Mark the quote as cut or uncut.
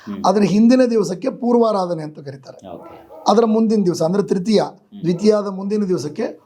uncut